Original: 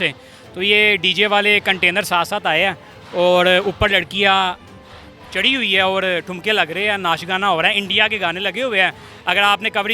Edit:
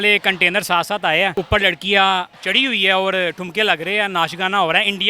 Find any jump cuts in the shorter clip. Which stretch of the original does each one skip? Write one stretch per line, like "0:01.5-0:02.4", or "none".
0:02.8-0:03.7
0:04.7-0:05.3